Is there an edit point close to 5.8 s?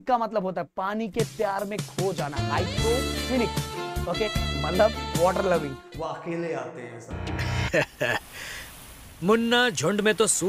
yes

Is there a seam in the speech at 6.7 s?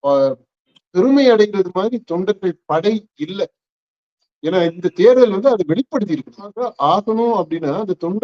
yes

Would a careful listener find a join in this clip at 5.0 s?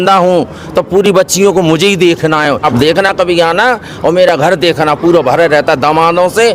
no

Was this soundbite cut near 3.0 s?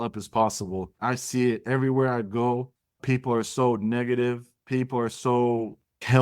yes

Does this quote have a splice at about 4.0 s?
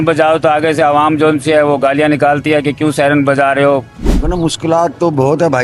yes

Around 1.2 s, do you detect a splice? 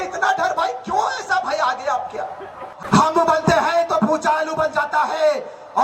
no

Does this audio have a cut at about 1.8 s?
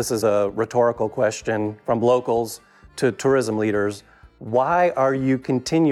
yes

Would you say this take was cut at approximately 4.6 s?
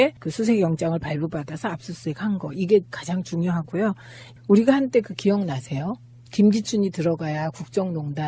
yes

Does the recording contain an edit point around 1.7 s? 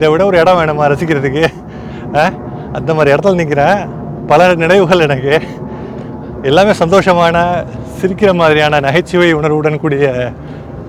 no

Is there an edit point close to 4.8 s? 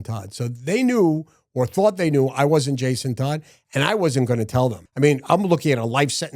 yes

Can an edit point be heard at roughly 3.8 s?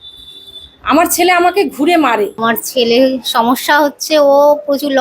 no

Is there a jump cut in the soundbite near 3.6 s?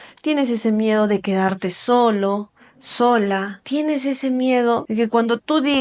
yes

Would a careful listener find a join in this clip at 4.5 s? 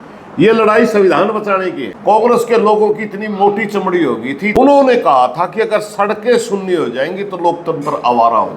yes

